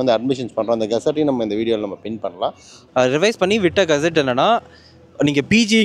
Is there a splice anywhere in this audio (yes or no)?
yes